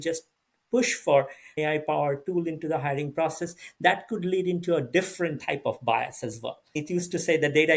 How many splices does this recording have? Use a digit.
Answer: 2